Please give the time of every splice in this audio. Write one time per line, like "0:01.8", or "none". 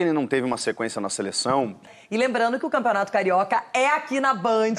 0:02.0